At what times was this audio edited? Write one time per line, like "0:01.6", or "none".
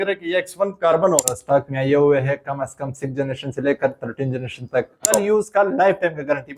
0:01.3
0:05.1